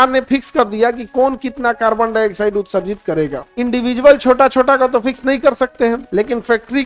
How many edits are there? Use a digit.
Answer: 2